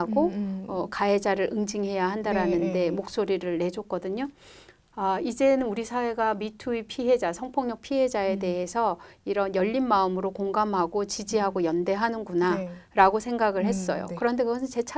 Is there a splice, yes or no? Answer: no